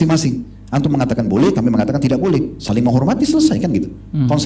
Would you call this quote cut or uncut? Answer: uncut